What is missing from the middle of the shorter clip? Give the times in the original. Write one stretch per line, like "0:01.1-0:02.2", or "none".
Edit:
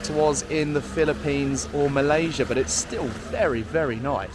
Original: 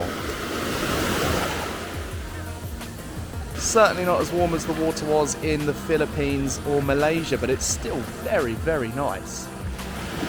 none